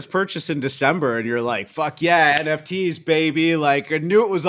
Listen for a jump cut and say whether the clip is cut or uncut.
uncut